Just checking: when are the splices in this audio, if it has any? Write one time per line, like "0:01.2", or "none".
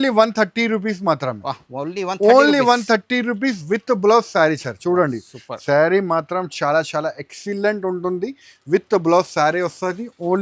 none